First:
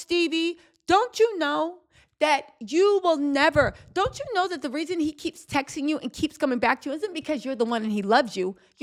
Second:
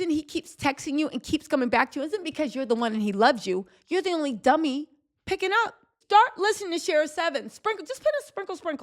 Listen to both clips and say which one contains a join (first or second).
second